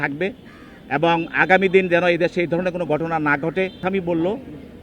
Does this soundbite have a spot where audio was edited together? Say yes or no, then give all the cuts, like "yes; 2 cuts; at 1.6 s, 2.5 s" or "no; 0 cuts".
yes; 1 cut; at 3.8 s